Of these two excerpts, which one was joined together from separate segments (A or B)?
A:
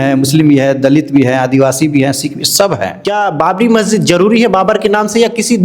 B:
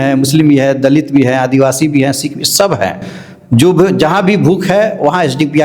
A